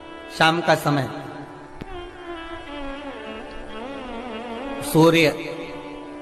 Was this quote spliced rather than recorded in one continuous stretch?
no; 0 cuts

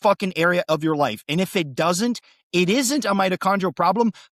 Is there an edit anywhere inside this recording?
no; 0 cuts

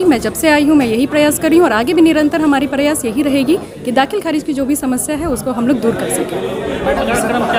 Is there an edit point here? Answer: no; 0 cuts

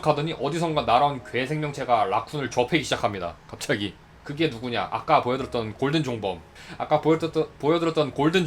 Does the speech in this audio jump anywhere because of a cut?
yes; 1 cut; at 4.0 s

